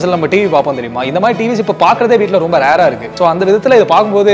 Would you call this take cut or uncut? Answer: cut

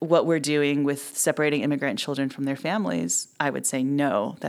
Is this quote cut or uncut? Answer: uncut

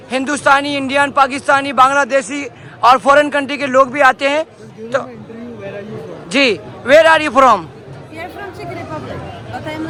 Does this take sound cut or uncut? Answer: uncut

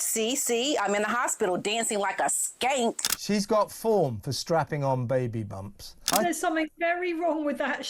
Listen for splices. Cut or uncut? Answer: cut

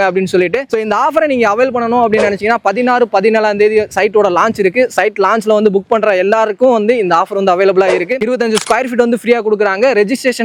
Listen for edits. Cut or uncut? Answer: uncut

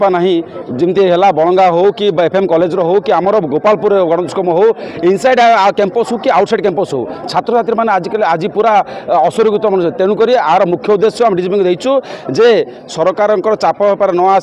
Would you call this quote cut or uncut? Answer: uncut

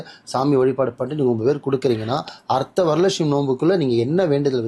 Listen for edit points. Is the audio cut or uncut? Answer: uncut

